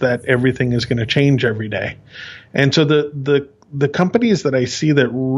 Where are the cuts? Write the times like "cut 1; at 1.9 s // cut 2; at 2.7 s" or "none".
none